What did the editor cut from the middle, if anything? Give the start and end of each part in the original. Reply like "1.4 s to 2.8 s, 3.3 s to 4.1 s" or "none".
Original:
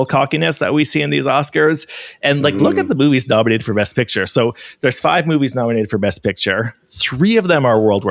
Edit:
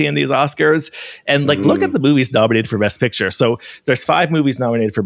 none